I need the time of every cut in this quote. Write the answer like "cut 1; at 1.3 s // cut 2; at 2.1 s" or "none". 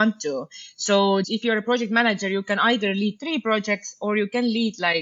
cut 1; at 1.3 s